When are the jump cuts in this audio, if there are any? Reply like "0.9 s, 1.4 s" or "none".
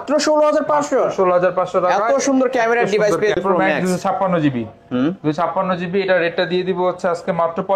3.4 s

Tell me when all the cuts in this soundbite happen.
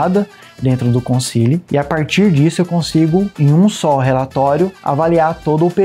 1.6 s, 3.3 s, 4.8 s

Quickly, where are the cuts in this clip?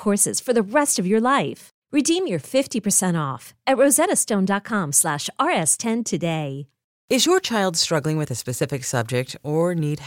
6.9 s

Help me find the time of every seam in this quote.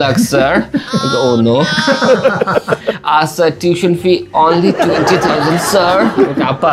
none

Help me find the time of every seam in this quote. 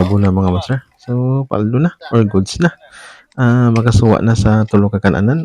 none

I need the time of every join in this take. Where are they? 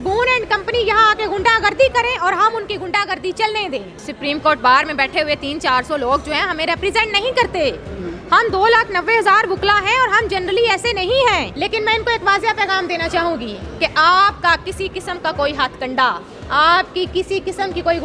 4.0 s, 11.5 s

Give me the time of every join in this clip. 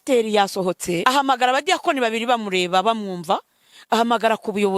1.0 s

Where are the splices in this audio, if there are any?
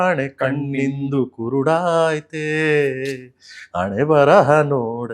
none

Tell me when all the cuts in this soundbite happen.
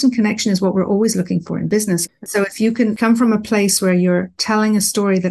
1.7 s

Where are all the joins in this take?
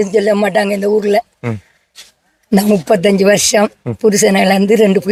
none

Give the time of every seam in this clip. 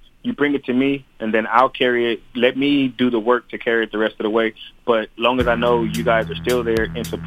none

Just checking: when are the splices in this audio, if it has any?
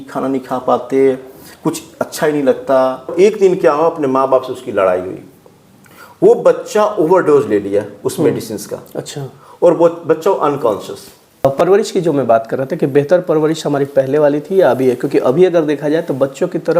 3.1 s, 11.4 s

